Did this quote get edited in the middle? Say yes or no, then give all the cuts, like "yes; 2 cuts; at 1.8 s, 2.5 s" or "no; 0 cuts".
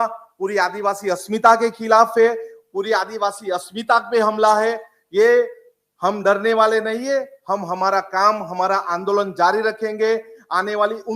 no; 0 cuts